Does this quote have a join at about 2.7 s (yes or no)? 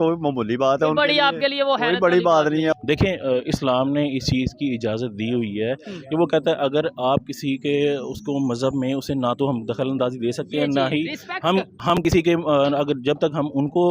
yes